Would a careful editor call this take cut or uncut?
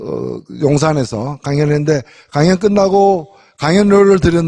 cut